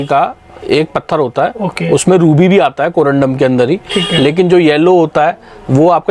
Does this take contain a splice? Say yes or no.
no